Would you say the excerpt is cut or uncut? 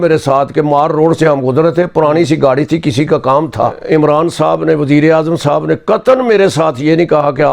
cut